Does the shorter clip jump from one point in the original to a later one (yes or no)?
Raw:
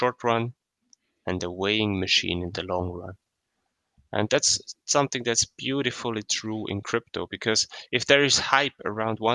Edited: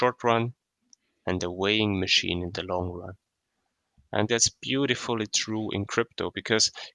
yes